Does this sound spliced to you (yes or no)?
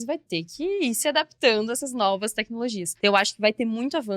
yes